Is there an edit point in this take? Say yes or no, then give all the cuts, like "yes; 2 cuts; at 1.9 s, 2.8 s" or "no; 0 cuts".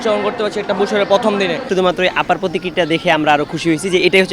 yes; 1 cut; at 1.6 s